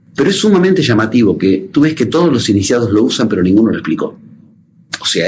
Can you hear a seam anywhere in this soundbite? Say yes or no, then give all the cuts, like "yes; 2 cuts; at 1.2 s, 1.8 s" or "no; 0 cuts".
no; 0 cuts